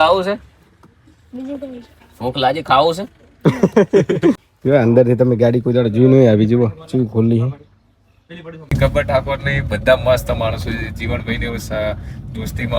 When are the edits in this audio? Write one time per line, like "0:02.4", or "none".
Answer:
0:04.5
0:08.7